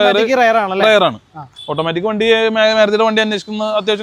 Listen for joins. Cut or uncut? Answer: uncut